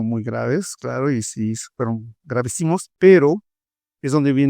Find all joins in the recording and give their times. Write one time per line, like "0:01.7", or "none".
0:02.9